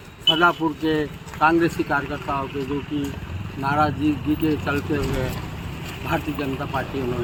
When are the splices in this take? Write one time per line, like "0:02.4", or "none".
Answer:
none